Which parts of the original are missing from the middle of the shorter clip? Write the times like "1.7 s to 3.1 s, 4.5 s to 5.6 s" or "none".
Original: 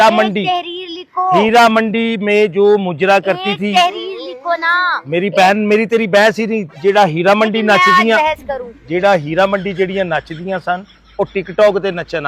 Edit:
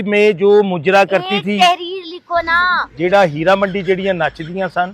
5.0 s to 8.7 s

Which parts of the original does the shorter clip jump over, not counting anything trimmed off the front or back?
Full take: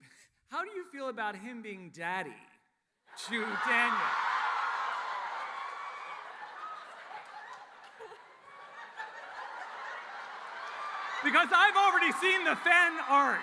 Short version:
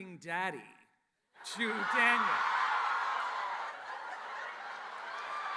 5.4 s to 9.2 s

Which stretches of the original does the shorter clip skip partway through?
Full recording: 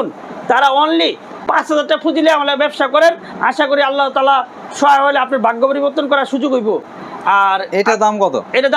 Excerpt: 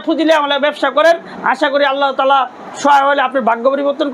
none

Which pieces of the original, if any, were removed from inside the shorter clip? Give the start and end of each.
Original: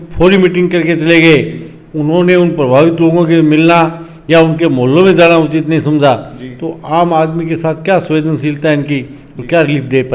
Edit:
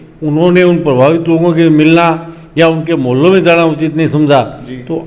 none

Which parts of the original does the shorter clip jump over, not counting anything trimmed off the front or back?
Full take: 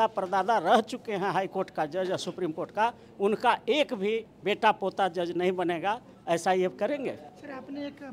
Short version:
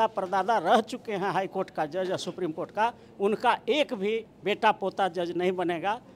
none

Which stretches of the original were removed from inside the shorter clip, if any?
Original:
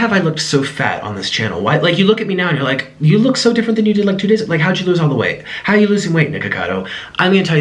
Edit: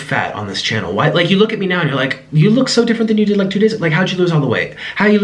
none

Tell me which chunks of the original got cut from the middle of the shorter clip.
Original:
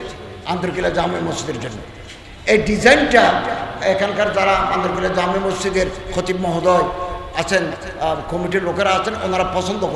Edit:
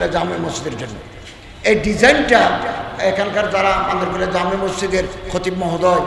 none

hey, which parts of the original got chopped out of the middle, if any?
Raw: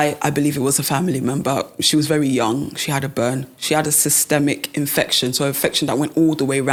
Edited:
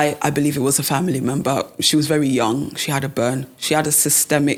none

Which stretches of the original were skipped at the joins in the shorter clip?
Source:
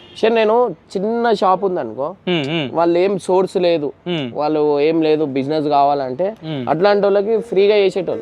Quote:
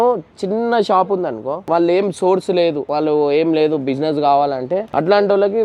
2.1 s to 2.7 s, 3.9 s to 4.3 s, 6.4 s to 6.6 s

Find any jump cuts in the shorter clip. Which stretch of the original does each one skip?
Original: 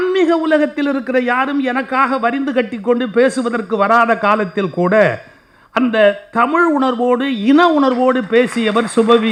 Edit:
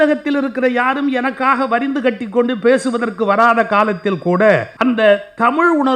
5.2 s to 5.7 s

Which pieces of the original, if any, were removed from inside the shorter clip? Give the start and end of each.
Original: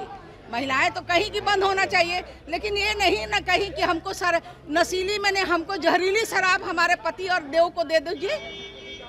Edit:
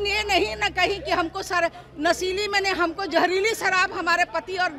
none

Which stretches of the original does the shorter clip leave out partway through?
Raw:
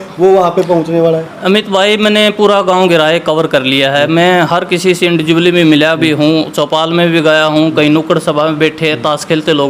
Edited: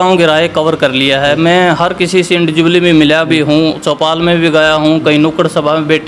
none

